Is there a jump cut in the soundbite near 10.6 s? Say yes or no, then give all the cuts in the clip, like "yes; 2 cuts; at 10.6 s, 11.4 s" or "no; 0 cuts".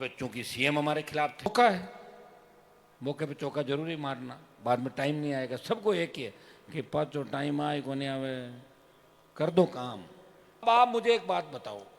yes; 2 cuts; at 1.5 s, 10.6 s